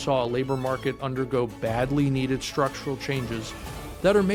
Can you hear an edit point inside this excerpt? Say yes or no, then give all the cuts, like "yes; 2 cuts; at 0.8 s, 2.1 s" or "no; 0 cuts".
no; 0 cuts